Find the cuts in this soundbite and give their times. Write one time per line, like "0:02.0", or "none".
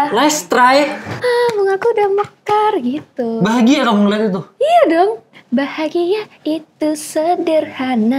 0:01.1

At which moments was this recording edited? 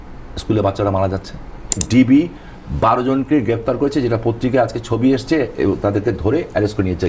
0:01.8

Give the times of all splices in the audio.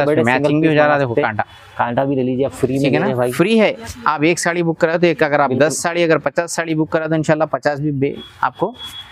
none

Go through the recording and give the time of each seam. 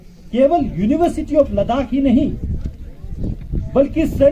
none

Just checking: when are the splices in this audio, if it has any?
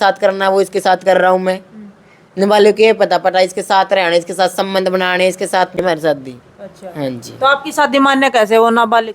0:05.8

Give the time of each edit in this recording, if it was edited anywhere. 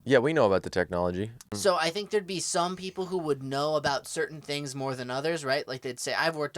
0:01.5

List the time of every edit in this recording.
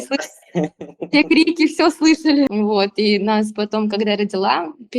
0:02.5

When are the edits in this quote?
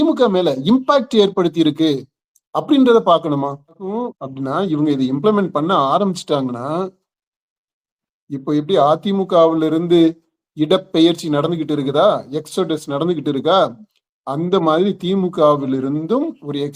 0:04.0

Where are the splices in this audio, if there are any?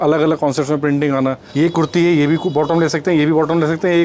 0:01.4

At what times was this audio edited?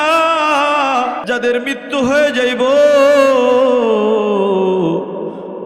0:01.2

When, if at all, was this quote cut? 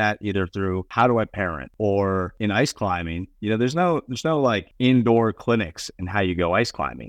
0:00.9
0:01.6
0:02.3
0:04.7

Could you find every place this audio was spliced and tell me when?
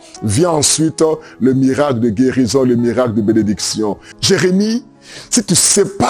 0:04.1

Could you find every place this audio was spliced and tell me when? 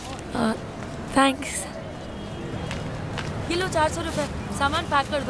none

